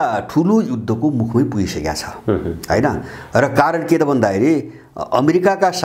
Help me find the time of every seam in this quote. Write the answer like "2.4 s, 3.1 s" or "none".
none